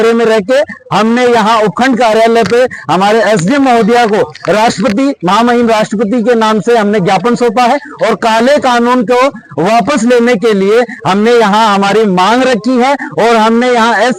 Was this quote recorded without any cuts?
yes; 0 cuts

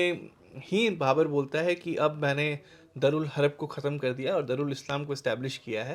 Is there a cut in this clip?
no; 0 cuts

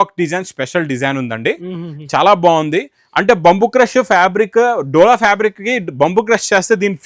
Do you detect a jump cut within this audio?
no; 0 cuts

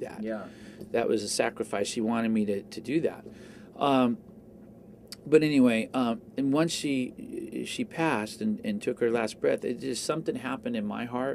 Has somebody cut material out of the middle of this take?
no; 0 cuts

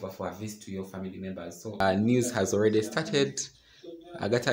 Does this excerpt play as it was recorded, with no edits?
no; 1 cut; at 1.8 s

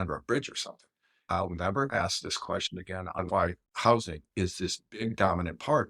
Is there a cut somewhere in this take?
yes; 2 cuts; at 1.3 s, 3.2 s

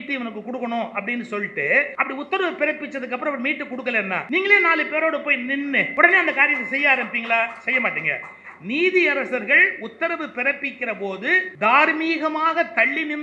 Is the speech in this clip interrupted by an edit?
yes; 4 cuts; at 1.9 s, 4.2 s, 5.9 s, 11.5 s

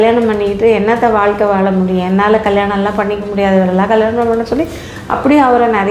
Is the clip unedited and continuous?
yes; 0 cuts

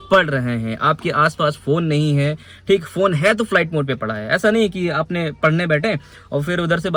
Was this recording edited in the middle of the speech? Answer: no; 0 cuts

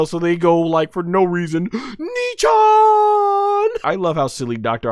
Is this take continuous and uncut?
no; 1 cut; at 3.8 s

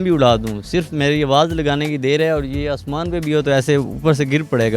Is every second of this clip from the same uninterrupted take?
yes; 0 cuts

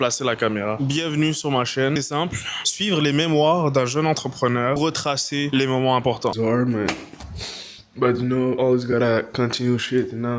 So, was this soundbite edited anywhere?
yes; 3 cuts; at 2.0 s, 4.8 s, 6.3 s

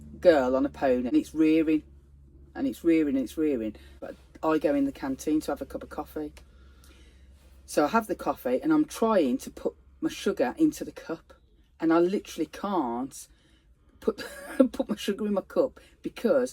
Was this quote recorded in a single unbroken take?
no; 2 cuts; at 1.1 s, 4.0 s

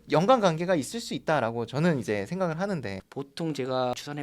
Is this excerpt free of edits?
no; 1 cut; at 3.0 s

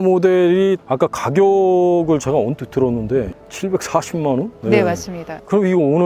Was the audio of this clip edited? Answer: yes; 2 cuts; at 0.8 s, 3.4 s

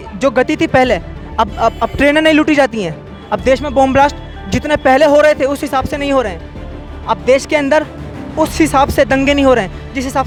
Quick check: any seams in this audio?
no; 0 cuts

